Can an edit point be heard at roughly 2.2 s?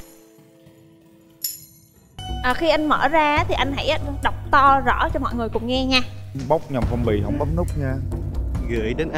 yes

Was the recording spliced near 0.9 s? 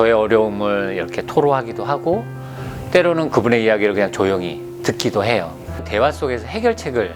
no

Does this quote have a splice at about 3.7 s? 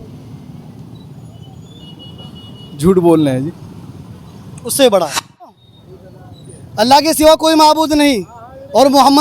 no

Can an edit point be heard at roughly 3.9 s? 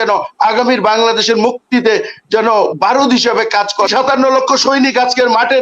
yes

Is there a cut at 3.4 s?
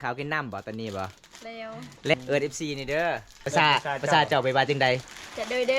yes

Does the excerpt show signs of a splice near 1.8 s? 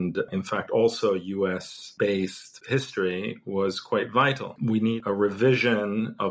yes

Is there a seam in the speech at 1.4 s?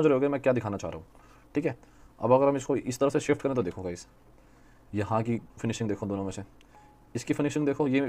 no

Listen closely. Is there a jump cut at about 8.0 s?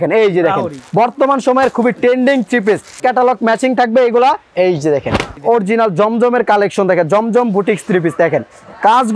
no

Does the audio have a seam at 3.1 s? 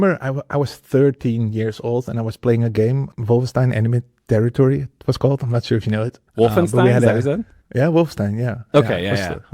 yes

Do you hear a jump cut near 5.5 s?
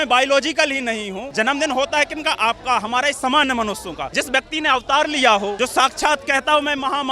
yes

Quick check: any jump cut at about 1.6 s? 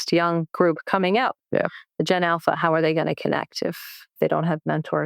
no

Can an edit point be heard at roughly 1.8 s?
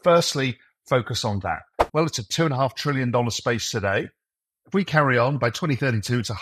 yes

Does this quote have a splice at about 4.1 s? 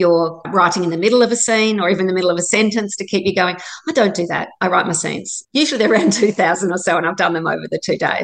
no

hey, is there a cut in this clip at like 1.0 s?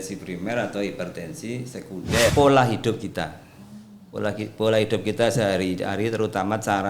no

